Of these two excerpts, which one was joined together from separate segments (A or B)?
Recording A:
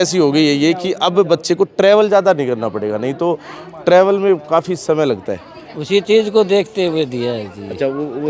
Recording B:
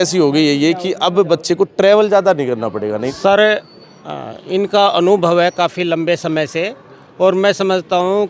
B